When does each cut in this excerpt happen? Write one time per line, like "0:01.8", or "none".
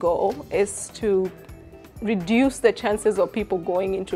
none

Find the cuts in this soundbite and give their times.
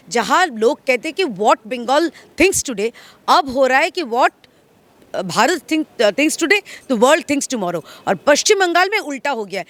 none

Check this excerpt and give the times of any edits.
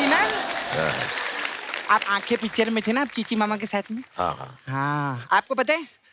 none

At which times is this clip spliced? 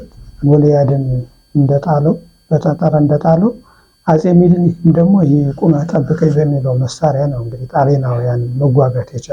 none

